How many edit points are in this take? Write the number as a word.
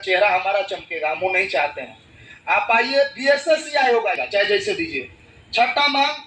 one